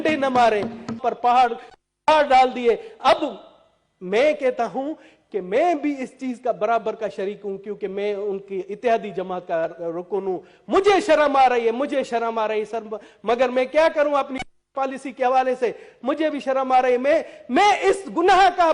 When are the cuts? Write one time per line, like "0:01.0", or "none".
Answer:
0:01.0